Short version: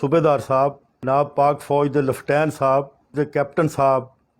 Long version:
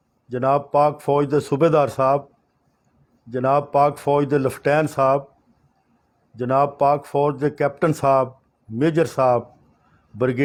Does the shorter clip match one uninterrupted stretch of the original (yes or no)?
no